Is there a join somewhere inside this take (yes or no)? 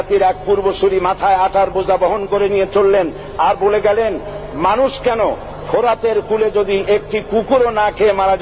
no